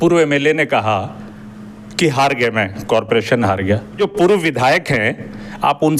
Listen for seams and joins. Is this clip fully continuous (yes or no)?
no